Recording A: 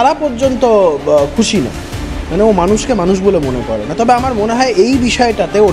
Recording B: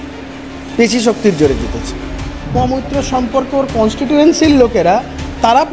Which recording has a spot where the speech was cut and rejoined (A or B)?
B